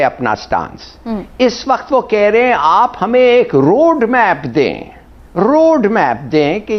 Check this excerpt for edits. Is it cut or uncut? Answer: uncut